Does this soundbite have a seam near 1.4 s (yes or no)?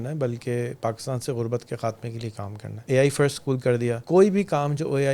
no